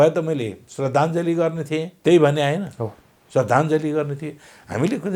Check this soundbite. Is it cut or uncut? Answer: cut